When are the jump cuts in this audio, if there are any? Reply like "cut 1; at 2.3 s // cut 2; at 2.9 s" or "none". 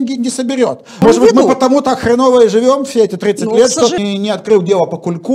cut 1; at 1.0 s // cut 2; at 4.0 s